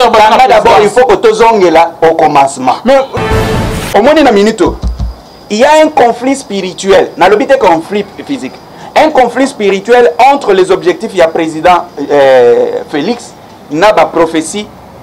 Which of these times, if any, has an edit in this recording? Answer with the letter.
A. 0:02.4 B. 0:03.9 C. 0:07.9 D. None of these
B